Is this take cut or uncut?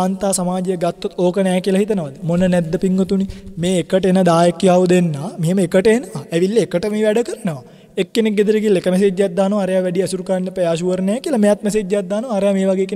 uncut